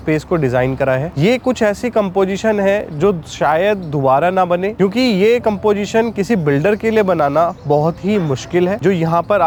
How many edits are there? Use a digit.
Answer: 0